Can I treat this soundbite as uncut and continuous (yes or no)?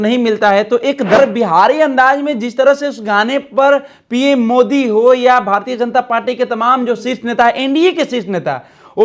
no